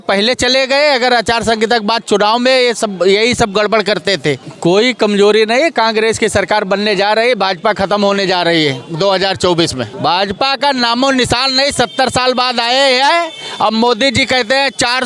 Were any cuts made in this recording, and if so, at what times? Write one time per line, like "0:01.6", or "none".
0:04.5
0:09.9

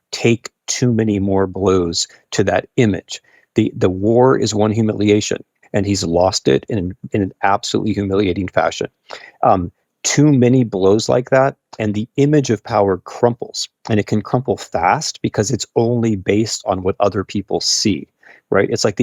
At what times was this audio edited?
0:05.5

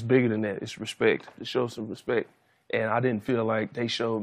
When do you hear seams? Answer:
0:01.4

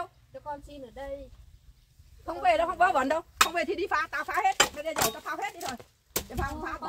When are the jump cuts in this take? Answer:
none

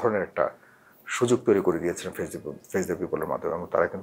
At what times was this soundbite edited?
none

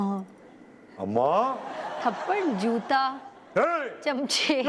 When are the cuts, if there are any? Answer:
0:01.9

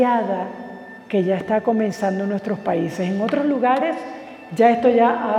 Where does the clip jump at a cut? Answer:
none

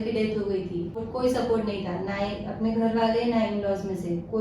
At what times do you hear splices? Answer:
0:01.0

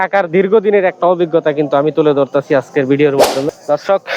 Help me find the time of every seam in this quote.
0:03.2

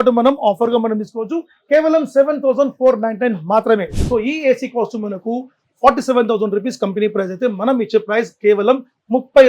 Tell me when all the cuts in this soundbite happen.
0:04.0

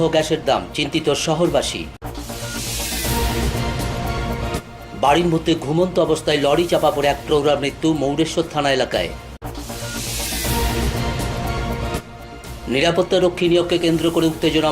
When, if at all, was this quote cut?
0:02.0
0:04.6

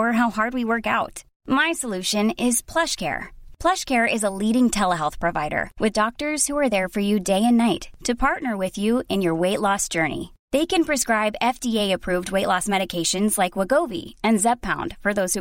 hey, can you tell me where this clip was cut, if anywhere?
none

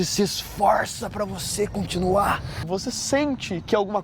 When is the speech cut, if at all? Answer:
0:02.7

